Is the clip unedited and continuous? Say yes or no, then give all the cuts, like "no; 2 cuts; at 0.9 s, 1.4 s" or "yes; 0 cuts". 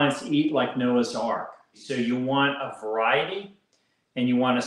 no; 1 cut; at 1.7 s